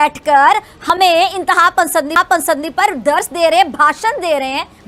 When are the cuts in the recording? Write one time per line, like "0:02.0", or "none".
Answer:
none